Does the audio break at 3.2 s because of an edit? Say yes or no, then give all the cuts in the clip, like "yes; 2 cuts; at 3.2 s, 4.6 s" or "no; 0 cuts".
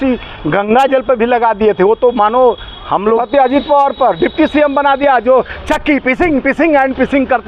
yes; 1 cut; at 3.2 s